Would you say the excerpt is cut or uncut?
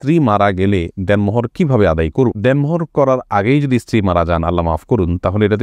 uncut